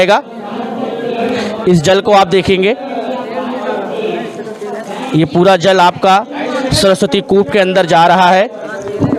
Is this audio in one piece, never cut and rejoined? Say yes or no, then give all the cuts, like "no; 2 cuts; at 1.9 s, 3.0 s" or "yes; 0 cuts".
yes; 0 cuts